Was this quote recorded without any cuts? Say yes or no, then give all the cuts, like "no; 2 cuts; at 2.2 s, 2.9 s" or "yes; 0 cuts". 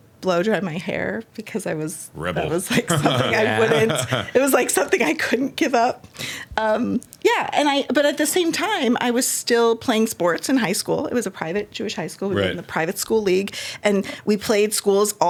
yes; 0 cuts